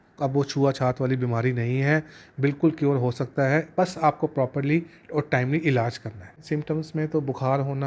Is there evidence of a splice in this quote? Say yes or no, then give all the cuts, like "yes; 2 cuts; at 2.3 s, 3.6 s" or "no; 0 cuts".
yes; 1 cut; at 6.4 s